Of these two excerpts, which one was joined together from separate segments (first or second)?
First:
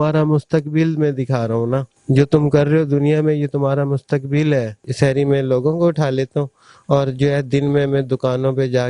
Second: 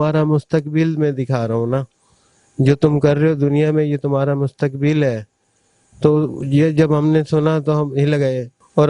first